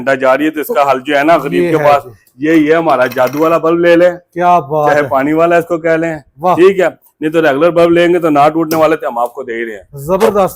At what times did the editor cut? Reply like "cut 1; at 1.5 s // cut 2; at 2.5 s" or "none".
none